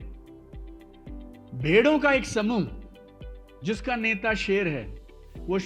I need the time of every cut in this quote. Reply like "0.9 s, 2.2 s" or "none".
none